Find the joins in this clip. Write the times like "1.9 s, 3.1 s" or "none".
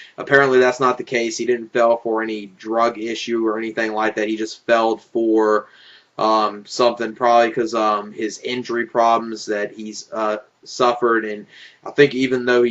7.7 s